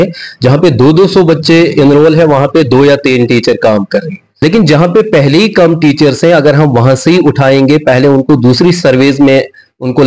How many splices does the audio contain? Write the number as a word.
one